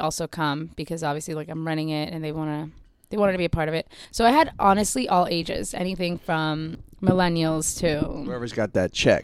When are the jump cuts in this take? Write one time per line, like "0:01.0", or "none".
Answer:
0:04.0
0:06.8